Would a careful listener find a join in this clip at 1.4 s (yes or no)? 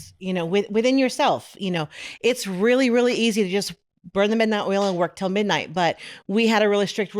no